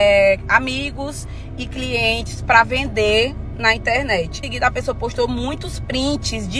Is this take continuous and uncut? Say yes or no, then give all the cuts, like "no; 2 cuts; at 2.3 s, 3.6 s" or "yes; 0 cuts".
no; 1 cut; at 4.4 s